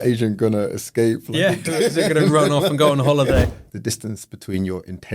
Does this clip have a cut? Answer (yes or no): yes